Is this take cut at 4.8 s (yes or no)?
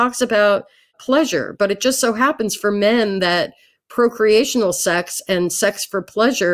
no